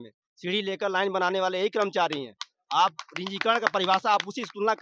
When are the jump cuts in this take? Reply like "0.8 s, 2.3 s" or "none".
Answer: none